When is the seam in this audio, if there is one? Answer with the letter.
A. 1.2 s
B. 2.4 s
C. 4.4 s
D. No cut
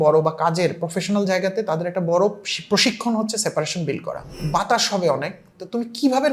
C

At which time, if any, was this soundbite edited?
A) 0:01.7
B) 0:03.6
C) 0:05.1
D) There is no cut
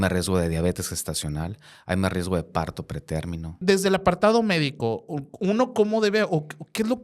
B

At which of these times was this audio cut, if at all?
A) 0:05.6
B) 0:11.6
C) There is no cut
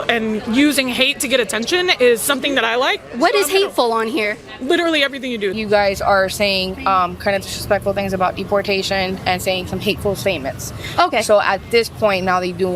A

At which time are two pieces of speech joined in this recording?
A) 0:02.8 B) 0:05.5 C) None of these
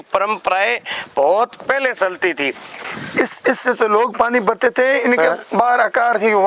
A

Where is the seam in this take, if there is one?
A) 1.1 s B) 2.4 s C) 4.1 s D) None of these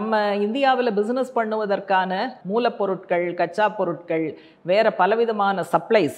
B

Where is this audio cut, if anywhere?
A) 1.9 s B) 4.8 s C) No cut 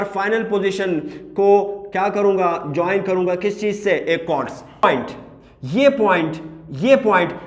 B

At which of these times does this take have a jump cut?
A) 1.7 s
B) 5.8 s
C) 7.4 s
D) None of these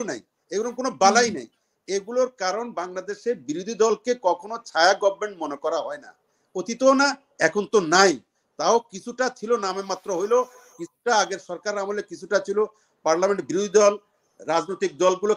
D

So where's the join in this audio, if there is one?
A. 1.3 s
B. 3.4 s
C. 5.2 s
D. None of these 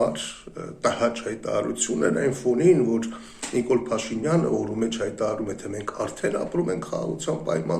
D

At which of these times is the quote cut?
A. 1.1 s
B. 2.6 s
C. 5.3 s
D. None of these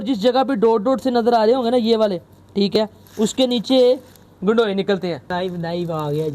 C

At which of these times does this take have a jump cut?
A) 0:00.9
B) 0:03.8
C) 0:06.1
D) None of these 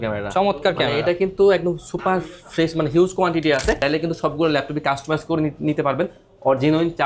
B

